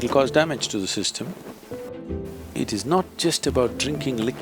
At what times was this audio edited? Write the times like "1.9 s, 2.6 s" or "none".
1.9 s